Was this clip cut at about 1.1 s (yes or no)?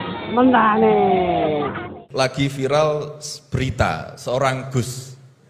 no